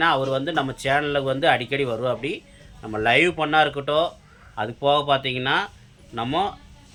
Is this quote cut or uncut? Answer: uncut